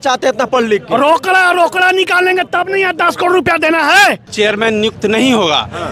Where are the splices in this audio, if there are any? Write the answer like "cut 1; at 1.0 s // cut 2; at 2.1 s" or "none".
cut 1; at 4.3 s